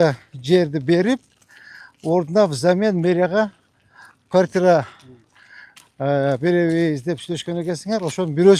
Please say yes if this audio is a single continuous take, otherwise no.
yes